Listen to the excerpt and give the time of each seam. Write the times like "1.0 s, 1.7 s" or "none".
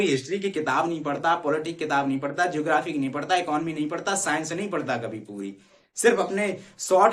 none